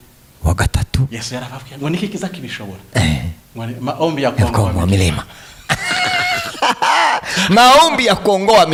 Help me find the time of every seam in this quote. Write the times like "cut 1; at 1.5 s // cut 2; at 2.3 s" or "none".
none